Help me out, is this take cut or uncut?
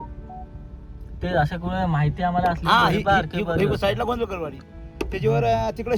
uncut